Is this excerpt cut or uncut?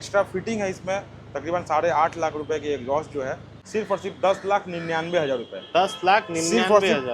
cut